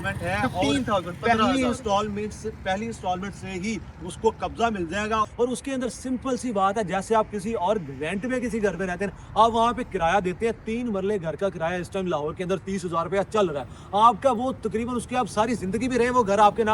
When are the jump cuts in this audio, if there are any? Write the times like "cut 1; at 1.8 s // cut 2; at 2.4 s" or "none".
cut 1; at 5.3 s